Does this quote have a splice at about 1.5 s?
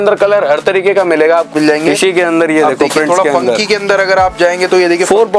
yes; 1 cut; at 1.5 s

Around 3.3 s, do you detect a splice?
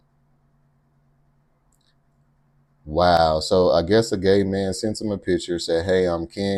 no; 0 cuts

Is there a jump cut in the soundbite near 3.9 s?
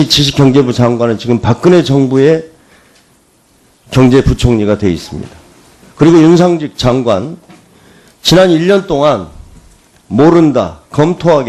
no; 1 cut; at 6.0 s

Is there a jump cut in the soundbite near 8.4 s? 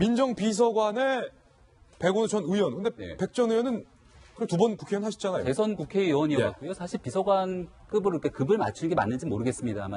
no; 1 cut; at 4.7 s

